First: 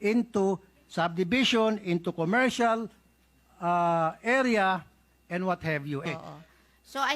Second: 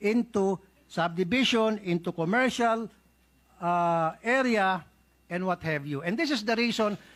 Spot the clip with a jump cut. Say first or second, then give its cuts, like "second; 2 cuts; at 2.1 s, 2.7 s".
first; 1 cut; at 6.0 s